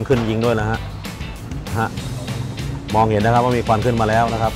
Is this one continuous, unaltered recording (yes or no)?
yes